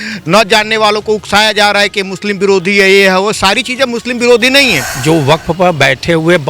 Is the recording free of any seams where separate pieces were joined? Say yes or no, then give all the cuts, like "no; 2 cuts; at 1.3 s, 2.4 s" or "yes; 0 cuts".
no; 1 cut; at 4.9 s